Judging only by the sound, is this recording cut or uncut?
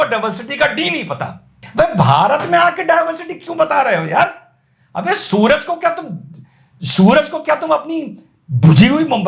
cut